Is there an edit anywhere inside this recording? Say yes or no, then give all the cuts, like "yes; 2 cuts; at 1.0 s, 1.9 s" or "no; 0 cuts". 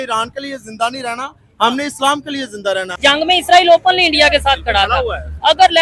yes; 1 cut; at 2.9 s